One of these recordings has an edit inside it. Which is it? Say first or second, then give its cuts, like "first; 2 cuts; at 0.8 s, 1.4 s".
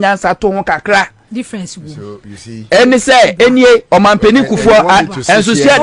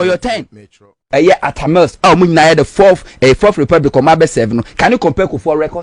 second; 1 cut; at 1.0 s